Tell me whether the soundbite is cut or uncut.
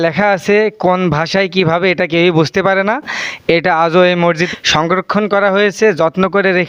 uncut